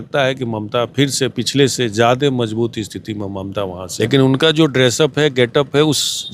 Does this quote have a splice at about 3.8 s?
yes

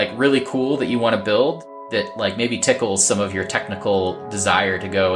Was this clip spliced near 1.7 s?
yes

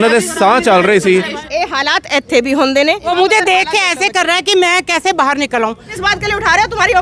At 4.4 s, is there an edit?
no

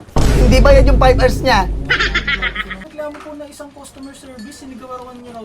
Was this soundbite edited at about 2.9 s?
yes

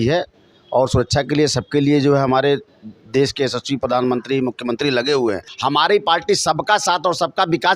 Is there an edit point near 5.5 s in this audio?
yes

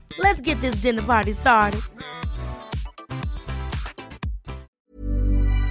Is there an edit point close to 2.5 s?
no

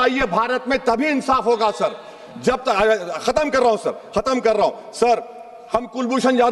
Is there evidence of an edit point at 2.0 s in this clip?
no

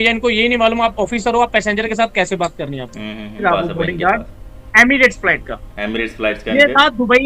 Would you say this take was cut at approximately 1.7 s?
no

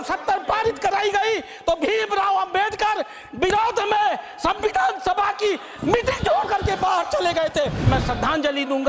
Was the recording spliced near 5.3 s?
no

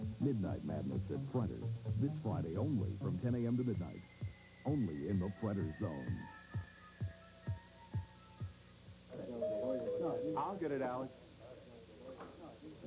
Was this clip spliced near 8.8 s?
yes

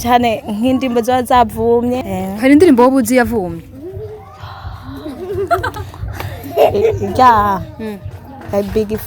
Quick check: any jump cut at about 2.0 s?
yes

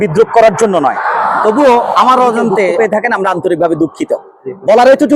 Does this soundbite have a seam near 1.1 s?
no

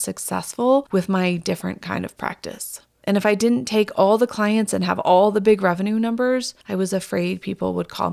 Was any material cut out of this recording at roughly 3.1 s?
no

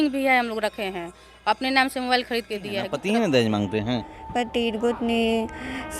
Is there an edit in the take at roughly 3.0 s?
yes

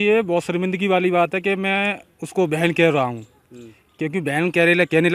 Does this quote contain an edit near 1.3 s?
no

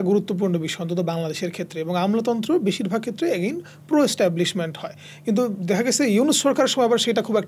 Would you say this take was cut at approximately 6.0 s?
no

